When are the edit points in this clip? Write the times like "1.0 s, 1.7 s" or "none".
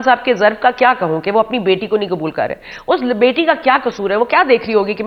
none